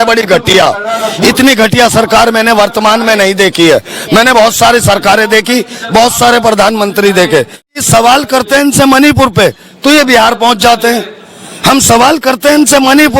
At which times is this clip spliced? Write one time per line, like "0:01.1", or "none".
0:07.7